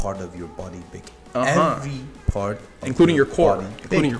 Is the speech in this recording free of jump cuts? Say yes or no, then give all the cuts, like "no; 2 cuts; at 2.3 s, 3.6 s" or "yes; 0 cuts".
yes; 0 cuts